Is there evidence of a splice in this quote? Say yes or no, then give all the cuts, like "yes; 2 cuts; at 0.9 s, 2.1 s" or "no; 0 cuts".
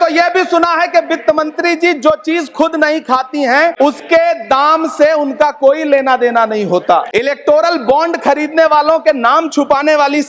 yes; 2 cuts; at 3.7 s, 7.1 s